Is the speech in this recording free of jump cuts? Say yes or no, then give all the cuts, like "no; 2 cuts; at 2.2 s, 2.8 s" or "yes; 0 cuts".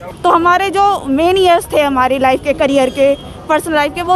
yes; 0 cuts